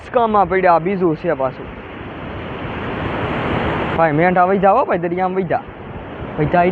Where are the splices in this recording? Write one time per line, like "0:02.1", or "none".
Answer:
none